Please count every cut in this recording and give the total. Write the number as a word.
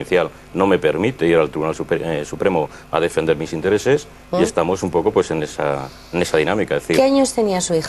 one